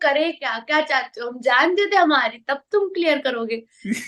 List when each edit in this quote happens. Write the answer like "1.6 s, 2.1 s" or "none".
none